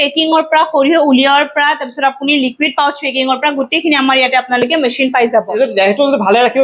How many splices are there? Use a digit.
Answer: 1